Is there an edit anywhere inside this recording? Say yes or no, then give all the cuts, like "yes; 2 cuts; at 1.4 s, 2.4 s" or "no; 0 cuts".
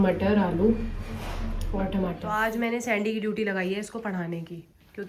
yes; 1 cut; at 2.2 s